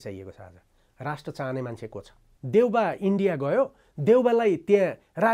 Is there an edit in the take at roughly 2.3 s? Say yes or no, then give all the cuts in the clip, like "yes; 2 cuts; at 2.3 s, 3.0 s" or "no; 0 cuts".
yes; 1 cut; at 2.3 s